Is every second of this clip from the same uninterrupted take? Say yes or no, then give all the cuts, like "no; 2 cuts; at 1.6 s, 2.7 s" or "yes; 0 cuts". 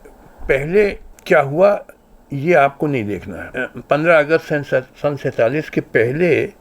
no; 2 cuts; at 1.1 s, 3.5 s